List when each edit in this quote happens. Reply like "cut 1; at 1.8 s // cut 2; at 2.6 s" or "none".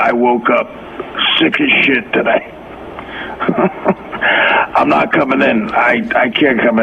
cut 1; at 5.2 s